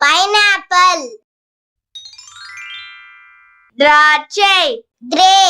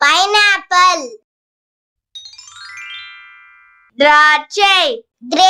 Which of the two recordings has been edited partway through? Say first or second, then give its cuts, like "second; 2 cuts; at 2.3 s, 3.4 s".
first; 2 cuts; at 2.0 s, 3.5 s